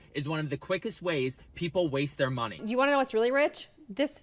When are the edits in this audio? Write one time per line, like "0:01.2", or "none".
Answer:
0:02.6